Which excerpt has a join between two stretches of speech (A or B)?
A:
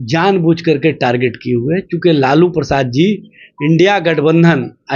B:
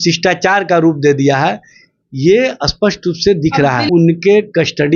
B